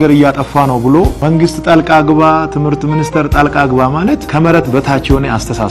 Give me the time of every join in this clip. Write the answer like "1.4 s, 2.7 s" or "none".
1.2 s, 4.3 s